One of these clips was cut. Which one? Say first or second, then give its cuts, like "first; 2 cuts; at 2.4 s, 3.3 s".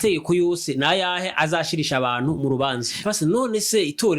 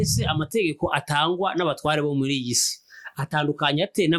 first; 1 cut; at 3.0 s